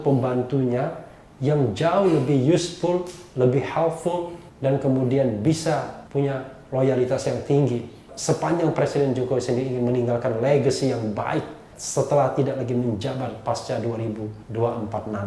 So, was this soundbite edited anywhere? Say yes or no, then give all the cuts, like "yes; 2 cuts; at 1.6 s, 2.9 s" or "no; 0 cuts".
yes; 2 cuts; at 6.0 s, 14.4 s